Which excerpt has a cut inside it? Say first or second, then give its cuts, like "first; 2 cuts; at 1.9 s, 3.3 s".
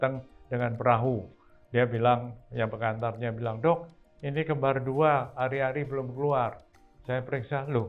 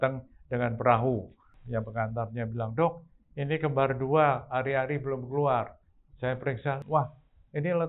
second; 2 cuts; at 1.5 s, 6.8 s